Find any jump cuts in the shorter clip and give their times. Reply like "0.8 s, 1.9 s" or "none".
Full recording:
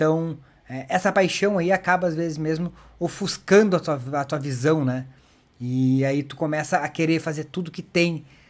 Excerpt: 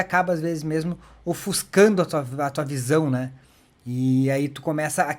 none